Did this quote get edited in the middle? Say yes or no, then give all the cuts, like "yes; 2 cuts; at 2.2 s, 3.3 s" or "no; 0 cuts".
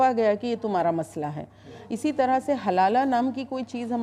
no; 0 cuts